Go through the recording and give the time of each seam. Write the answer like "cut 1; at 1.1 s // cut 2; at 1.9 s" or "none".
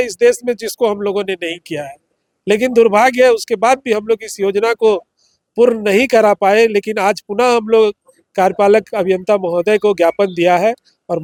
none